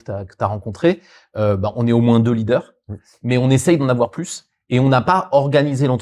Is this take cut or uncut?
uncut